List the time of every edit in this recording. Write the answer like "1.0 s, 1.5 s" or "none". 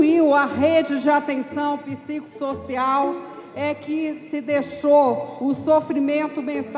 none